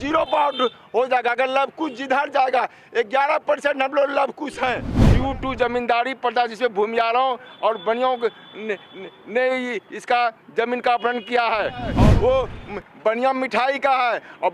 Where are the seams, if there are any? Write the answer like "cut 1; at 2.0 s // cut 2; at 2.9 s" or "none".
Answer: cut 1; at 5.0 s // cut 2; at 12.0 s